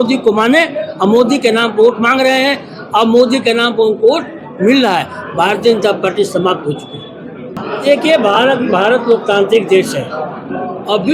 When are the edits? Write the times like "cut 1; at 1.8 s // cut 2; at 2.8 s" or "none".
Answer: none